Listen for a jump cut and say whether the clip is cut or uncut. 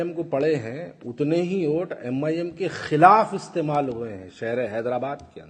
uncut